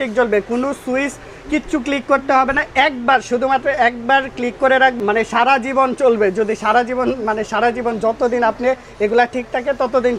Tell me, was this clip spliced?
no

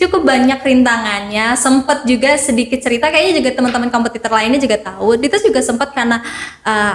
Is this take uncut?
yes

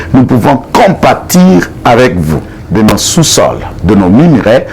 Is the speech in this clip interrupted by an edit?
yes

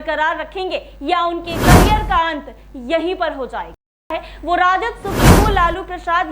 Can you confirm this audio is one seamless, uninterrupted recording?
no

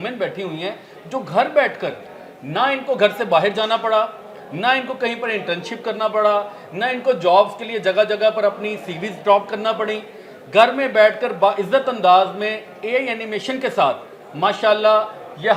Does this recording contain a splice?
no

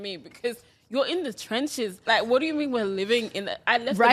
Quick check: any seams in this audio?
yes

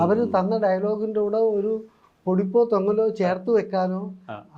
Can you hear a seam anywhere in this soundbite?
no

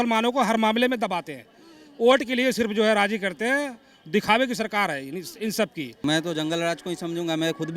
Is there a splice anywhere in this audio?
yes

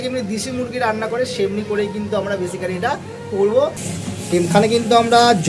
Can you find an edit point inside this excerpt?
yes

